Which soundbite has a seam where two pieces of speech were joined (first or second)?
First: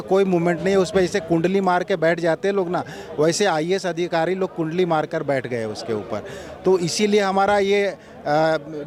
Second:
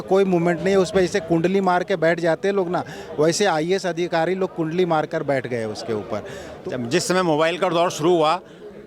second